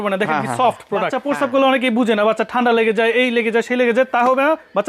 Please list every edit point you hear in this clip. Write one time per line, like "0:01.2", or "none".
0:01.1